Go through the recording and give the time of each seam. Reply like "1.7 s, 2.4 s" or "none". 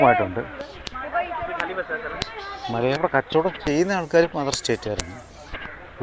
3.0 s